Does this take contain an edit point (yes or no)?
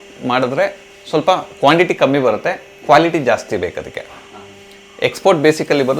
no